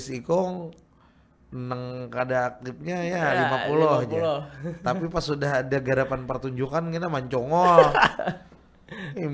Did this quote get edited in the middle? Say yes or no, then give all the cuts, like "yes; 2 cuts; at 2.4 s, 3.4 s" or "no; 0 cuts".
no; 0 cuts